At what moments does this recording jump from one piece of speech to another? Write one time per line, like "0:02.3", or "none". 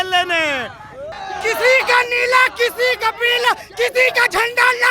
0:01.0